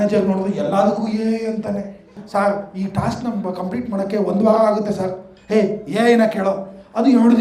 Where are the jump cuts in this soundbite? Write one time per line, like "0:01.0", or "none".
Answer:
0:02.2